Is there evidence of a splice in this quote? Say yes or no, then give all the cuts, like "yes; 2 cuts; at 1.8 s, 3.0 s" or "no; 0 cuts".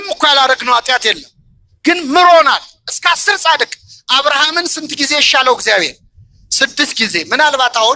no; 0 cuts